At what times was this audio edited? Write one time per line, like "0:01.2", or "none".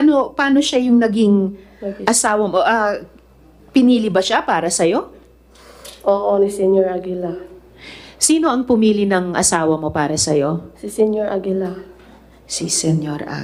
none

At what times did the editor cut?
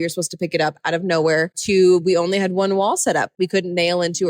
0:03.3

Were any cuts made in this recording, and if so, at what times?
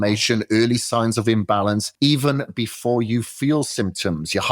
0:01.9

